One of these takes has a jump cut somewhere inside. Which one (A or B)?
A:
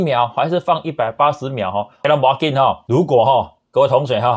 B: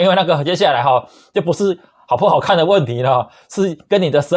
A